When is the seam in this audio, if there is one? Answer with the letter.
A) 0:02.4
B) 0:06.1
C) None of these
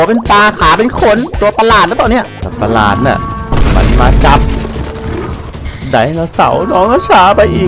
A